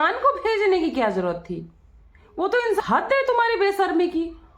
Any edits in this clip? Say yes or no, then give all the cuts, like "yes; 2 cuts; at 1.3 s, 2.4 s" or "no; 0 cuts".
yes; 1 cut; at 2.8 s